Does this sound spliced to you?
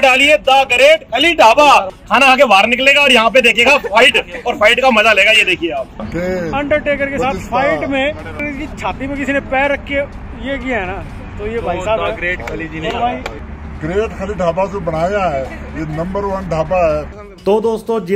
yes; 5 cuts; at 2.0 s, 6.1 s, 8.4 s, 13.4 s, 17.2 s

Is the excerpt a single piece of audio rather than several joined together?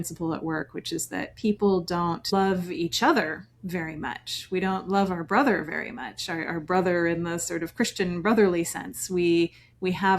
no; 1 cut; at 2.3 s

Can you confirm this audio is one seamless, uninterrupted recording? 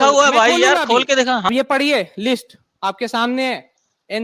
no; 1 cut; at 1.5 s

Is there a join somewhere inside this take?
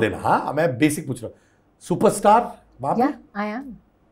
no; 0 cuts

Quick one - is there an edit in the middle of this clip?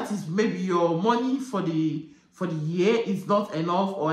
no; 0 cuts

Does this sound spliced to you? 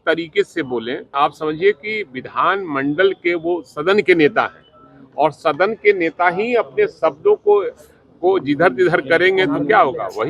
yes; 1 cut; at 1.1 s

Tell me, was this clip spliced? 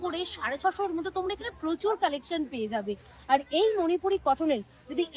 no; 0 cuts

